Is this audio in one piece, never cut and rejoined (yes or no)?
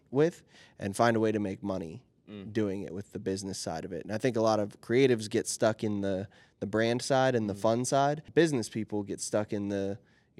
no